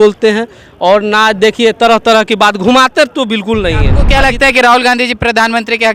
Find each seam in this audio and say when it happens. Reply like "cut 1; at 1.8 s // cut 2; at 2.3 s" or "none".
cut 1; at 4.0 s